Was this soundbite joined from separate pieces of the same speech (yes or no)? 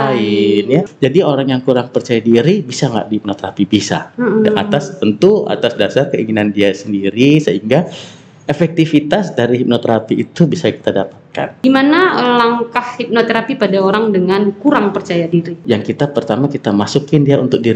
yes